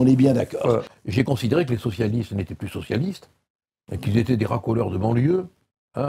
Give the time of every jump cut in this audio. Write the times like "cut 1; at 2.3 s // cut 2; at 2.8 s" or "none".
cut 1; at 0.9 s